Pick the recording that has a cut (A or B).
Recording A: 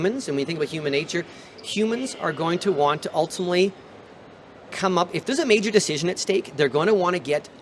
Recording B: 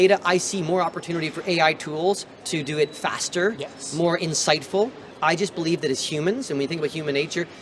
B